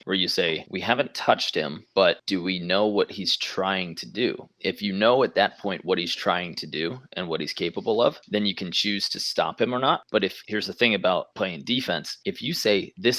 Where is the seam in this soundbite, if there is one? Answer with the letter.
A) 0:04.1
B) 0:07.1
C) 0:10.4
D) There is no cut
C